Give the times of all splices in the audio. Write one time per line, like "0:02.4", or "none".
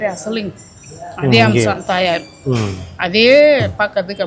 none